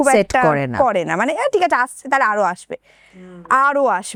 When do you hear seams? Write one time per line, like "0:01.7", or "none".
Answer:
none